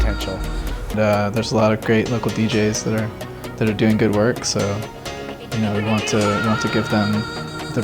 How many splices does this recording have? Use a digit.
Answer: 1